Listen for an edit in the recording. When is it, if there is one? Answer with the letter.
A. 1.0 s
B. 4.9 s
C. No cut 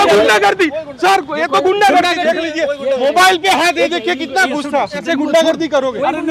C